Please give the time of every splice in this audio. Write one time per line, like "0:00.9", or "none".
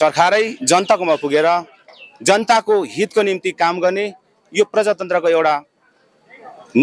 none